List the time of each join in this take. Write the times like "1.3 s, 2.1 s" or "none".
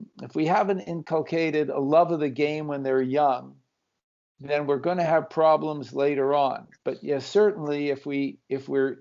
0.9 s